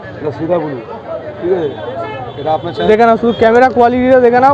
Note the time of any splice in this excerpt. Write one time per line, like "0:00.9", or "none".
0:02.8